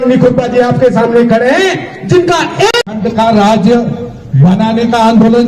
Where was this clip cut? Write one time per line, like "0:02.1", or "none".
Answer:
0:02.8